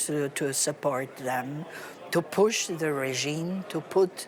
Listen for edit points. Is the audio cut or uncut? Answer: uncut